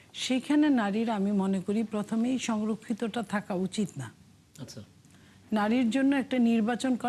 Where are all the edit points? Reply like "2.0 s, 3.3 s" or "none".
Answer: none